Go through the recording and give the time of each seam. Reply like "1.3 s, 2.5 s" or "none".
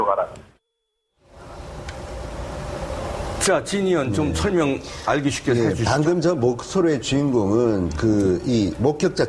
4.0 s